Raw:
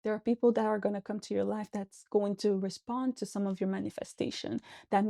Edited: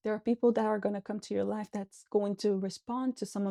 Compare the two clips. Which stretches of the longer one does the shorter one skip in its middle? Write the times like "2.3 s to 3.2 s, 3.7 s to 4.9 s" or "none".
none